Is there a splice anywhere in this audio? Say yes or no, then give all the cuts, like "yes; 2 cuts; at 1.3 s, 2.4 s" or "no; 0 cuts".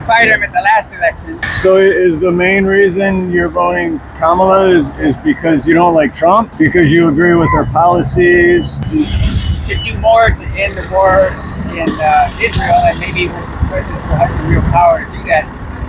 no; 0 cuts